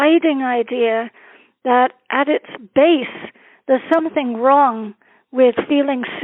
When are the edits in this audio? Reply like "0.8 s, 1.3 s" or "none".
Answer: none